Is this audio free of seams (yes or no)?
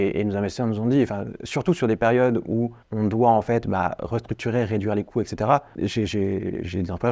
no